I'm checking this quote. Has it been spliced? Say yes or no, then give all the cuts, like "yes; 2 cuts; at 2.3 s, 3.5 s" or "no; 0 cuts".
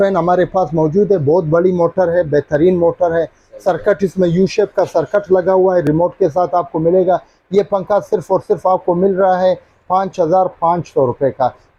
no; 0 cuts